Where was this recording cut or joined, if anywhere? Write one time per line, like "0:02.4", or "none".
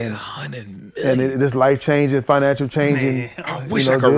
none